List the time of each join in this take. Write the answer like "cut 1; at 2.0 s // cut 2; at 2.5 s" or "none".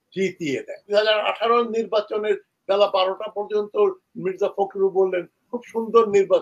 cut 1; at 0.9 s